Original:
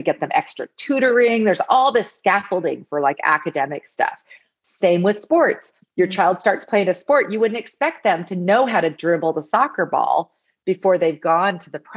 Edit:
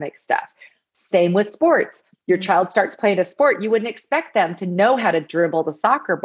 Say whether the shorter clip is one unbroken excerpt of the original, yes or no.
yes